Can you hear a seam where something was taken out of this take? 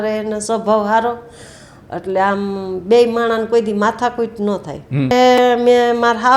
yes; 1 cut; at 5.1 s

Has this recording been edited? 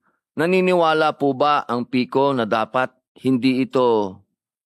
no; 0 cuts

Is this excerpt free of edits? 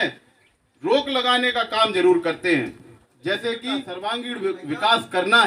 no; 1 cut; at 3.9 s

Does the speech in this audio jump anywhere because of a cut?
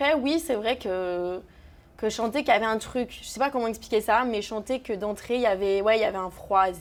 no; 0 cuts

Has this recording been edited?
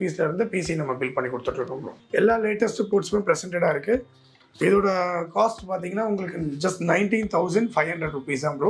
yes; 1 cut; at 1.9 s

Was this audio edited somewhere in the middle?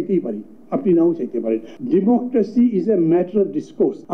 yes; 1 cut; at 1.7 s

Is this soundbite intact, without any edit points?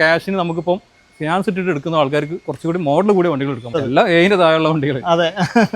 no; 1 cut; at 3.8 s

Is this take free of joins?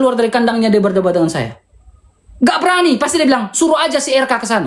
yes; 0 cuts

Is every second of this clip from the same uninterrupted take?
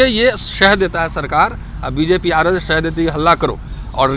yes; 0 cuts

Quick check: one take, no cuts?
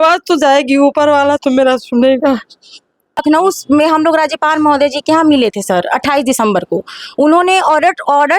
no; 1 cut; at 3.2 s

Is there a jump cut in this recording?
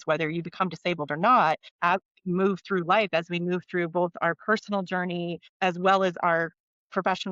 yes; 2 cuts; at 1.7 s, 5.4 s

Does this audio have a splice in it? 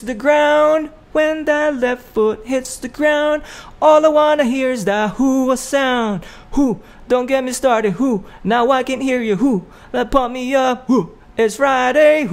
no; 0 cuts

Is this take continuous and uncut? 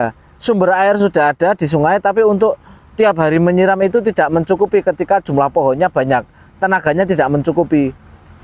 yes; 0 cuts

